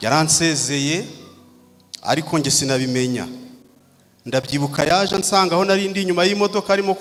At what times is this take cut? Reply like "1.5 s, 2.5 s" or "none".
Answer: none